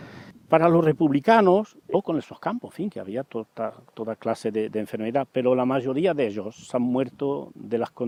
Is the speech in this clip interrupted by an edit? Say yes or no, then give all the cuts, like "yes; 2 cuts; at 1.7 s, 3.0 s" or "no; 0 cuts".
no; 0 cuts